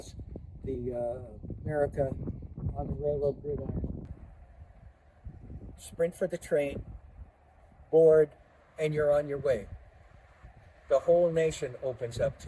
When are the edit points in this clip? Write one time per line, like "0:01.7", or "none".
0:04.1

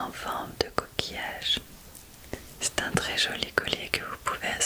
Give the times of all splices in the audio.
0:01.8

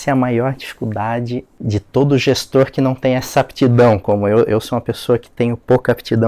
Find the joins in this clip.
0:01.5

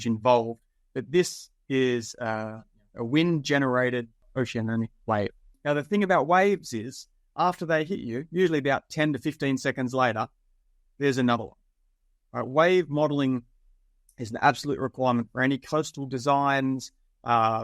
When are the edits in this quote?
0:04.2
0:05.5

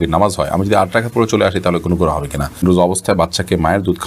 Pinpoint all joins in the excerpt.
0:02.5

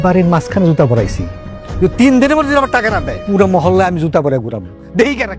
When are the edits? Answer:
0:03.1

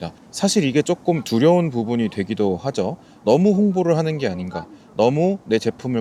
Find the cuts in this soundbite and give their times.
none

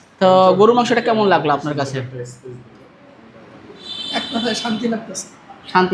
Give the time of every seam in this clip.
none

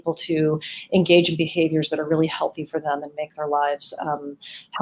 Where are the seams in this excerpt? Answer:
none

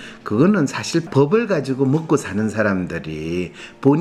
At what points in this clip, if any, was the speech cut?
0:01.1

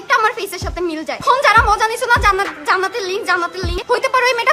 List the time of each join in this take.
0:01.2
0:03.7

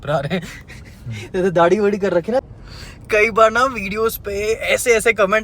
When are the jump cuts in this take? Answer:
0:02.4

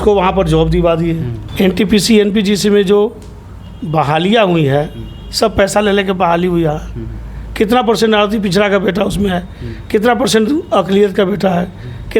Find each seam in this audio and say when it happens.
0:01.3

